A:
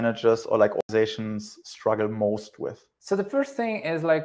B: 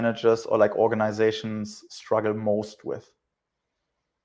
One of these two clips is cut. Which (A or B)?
A